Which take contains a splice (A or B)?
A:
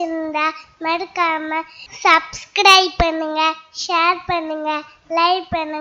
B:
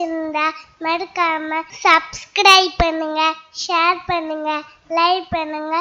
B